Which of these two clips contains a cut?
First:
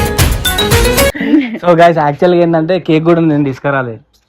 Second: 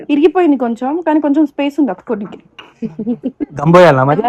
first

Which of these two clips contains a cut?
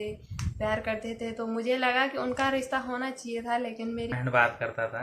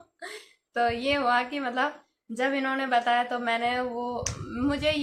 first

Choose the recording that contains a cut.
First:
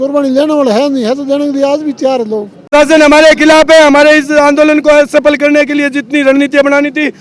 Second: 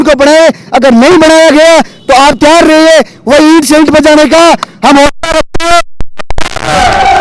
first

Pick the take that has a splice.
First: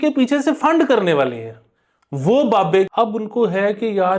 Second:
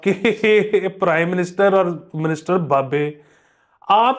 first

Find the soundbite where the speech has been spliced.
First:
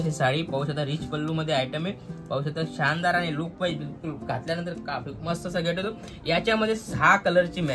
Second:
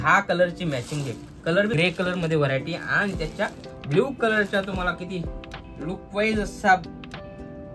second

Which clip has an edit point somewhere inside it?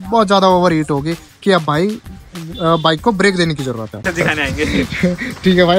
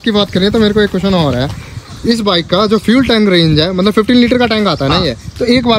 first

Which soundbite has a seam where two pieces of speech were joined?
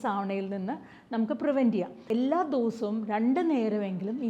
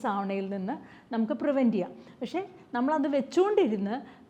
first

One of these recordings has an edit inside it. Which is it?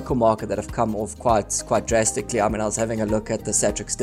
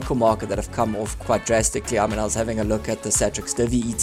second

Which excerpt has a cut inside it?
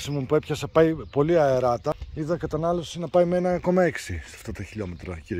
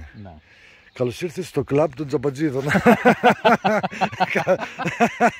first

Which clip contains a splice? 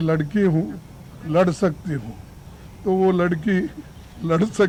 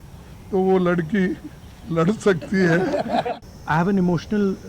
second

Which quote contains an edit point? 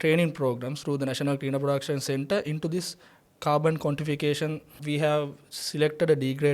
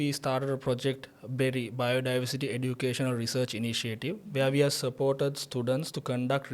first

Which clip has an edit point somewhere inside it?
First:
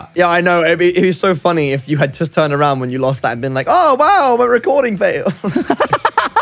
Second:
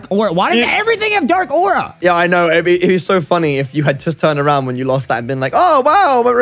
first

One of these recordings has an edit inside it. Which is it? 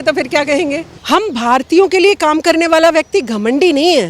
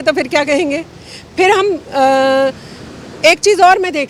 first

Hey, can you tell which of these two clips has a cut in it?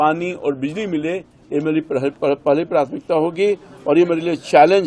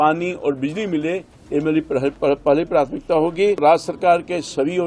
second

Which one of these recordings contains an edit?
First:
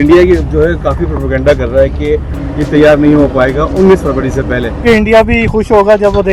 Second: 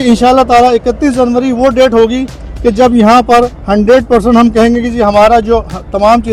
first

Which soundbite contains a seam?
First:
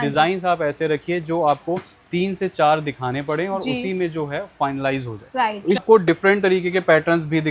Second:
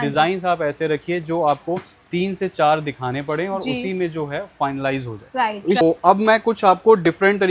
first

